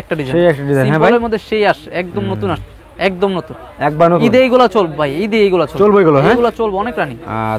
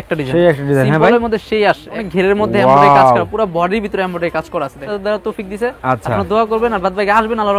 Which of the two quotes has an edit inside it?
second; 2 cuts; at 2.0 s, 4.8 s

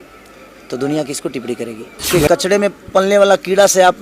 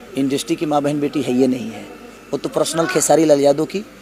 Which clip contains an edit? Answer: first; 1 cut; at 2.1 s

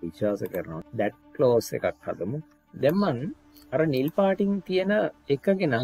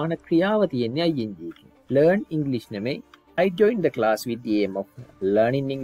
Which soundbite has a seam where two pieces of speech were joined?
first; 1 cut; at 2.6 s

